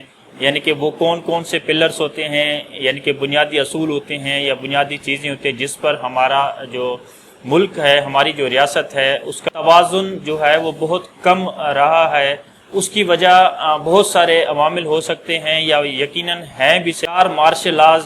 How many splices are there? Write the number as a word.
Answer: two